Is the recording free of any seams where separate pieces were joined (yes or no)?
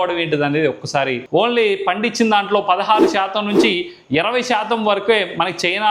no